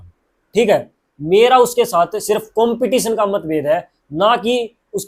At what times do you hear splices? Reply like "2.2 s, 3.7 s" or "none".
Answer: none